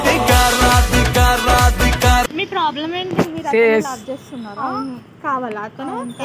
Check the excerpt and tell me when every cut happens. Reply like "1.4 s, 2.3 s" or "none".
2.3 s